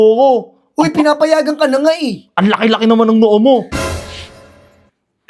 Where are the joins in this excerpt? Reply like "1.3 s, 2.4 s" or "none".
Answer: none